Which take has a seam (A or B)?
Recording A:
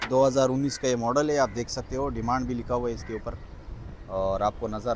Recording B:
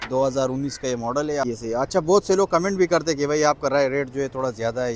B